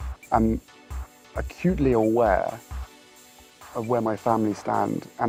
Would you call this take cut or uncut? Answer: uncut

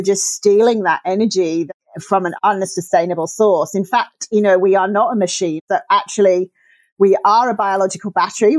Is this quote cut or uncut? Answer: cut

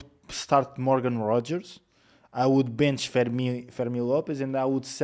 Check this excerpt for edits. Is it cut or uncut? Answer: uncut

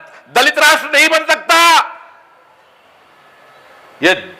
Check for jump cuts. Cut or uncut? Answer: uncut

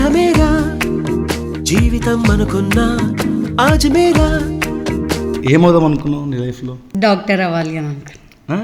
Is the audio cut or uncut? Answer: cut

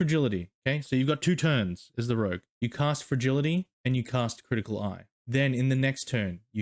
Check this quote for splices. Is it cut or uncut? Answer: cut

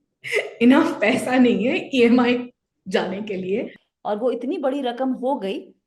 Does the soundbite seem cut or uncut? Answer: cut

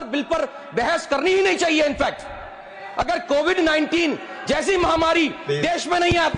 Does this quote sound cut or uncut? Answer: uncut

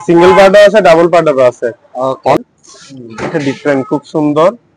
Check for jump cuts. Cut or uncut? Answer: cut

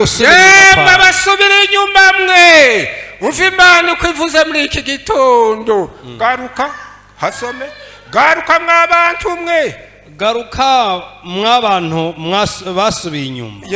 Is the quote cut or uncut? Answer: uncut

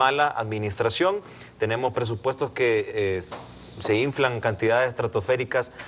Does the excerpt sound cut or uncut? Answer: uncut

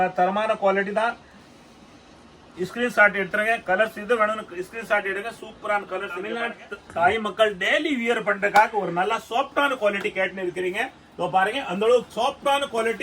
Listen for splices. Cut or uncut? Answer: cut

